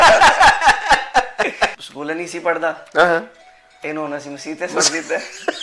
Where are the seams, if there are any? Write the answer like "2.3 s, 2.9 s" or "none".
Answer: 1.8 s